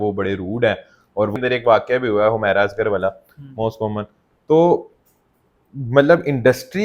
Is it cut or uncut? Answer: cut